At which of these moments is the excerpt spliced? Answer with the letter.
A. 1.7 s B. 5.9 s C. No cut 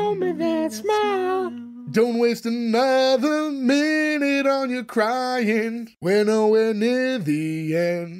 B